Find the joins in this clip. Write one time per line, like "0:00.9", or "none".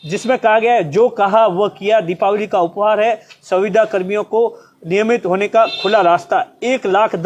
none